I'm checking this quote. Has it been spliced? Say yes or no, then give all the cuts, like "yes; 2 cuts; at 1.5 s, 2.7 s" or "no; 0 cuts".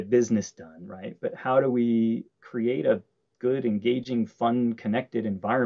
no; 0 cuts